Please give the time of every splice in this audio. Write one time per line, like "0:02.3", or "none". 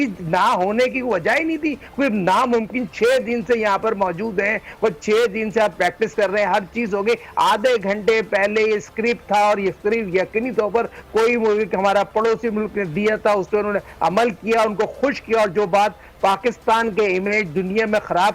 none

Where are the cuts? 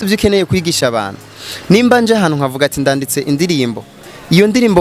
none

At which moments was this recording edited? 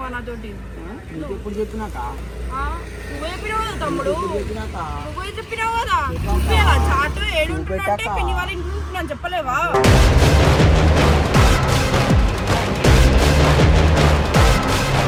none

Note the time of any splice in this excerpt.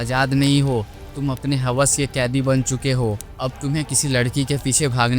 0:03.3

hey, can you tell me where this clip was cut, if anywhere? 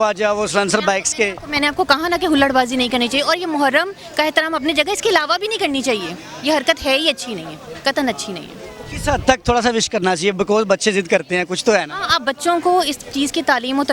none

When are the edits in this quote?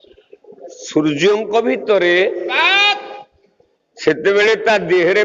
0:01.8

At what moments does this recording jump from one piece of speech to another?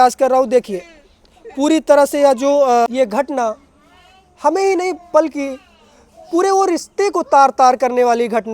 0:02.9

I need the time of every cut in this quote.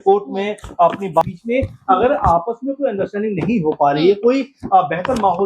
0:01.2

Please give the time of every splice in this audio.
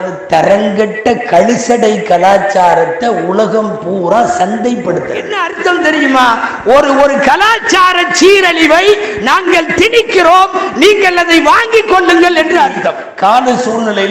0:05.4
0:13.0

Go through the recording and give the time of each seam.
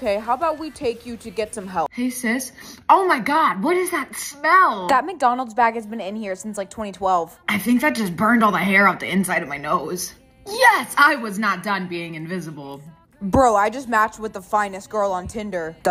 0:01.9

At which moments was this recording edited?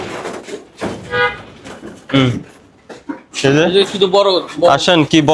none

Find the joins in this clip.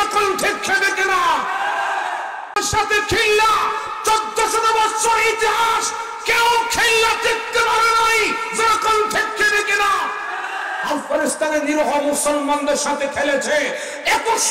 0:02.6

